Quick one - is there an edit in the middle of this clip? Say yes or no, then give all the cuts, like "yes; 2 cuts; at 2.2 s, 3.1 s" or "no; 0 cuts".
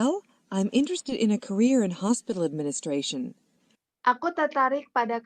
no; 0 cuts